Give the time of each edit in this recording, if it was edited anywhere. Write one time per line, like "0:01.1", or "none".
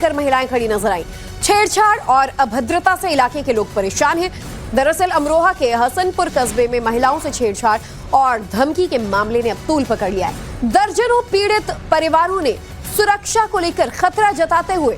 0:08.3